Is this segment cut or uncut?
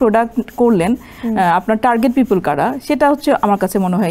uncut